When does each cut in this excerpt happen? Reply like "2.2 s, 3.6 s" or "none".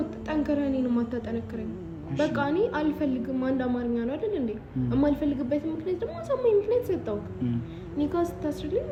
none